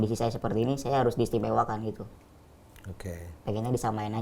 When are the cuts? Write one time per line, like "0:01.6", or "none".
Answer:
none